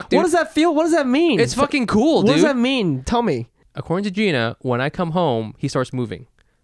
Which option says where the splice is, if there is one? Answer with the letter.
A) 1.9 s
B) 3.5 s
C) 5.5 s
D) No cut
B